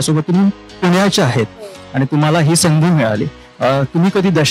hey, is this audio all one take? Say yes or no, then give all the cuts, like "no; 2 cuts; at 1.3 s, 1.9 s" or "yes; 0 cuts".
yes; 0 cuts